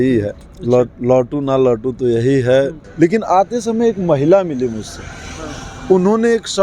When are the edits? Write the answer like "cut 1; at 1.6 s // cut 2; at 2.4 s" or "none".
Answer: cut 1; at 2.8 s